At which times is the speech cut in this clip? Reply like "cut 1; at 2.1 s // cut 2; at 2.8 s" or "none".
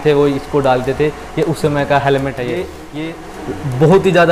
cut 1; at 2.8 s

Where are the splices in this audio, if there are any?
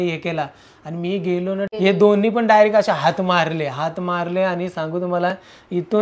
cut 1; at 1.7 s

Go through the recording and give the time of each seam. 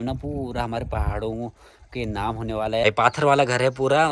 cut 1; at 2.8 s

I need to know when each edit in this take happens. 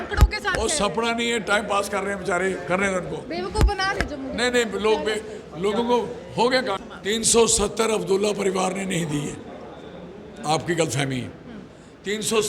cut 1; at 6.9 s

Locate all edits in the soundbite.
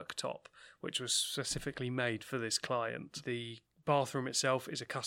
cut 1; at 3.1 s

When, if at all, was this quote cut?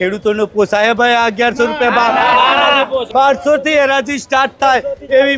cut 1; at 3.1 s

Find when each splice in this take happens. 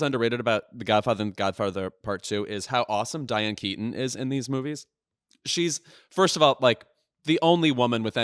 none

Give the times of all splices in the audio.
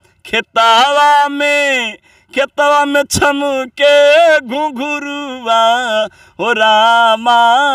none

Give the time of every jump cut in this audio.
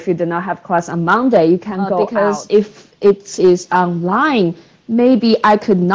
cut 1; at 2.0 s

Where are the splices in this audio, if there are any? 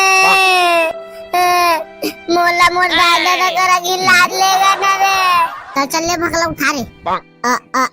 cut 1; at 5.6 s

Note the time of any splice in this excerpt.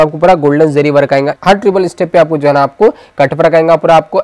cut 1; at 1.4 s

